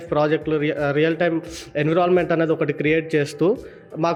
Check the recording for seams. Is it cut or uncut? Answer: uncut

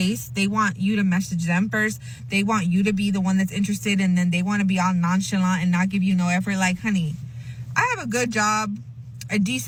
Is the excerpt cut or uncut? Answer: uncut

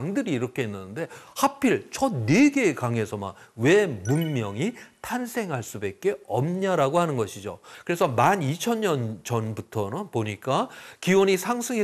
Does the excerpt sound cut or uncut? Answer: cut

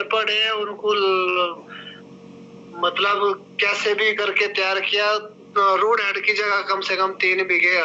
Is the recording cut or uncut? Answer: uncut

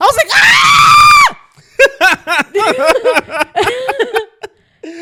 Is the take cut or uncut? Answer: uncut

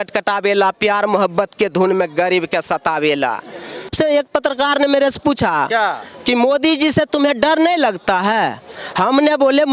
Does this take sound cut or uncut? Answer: cut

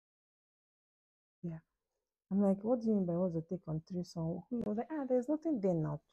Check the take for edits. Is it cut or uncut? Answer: cut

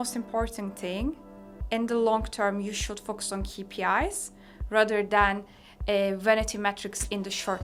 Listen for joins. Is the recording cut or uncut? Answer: uncut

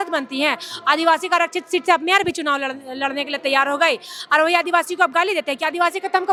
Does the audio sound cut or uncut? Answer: uncut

